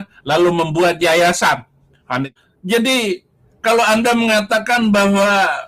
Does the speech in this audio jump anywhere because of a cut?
yes; 1 cut; at 2.3 s

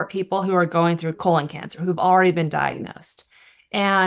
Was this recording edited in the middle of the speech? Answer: yes; 1 cut; at 1.2 s

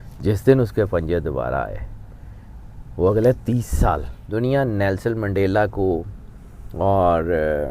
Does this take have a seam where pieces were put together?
yes; 1 cut; at 4.1 s

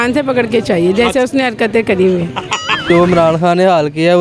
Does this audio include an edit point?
yes; 1 cut; at 2.9 s

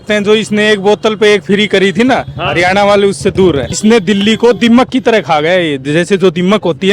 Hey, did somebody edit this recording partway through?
yes; 1 cut; at 3.7 s

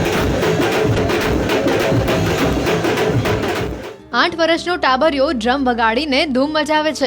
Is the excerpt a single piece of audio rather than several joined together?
no; 1 cut; at 1.0 s

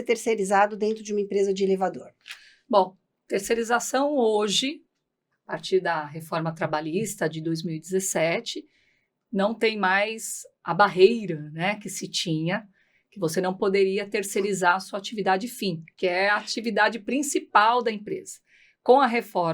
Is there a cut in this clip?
yes; 1 cut; at 15.9 s

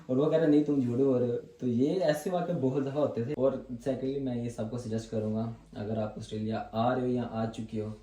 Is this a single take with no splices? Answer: no; 1 cut; at 3.3 s

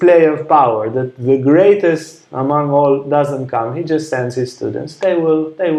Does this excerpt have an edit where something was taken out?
no; 0 cuts

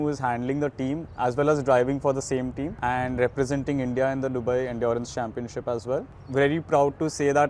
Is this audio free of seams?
no; 3 cuts; at 1.1 s, 2.7 s, 6.2 s

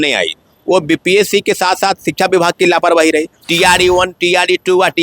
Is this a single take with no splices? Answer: no; 1 cut; at 3.4 s

